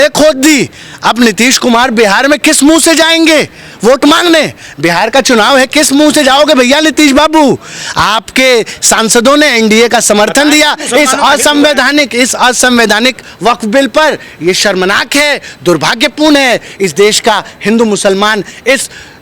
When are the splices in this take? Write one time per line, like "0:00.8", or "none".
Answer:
none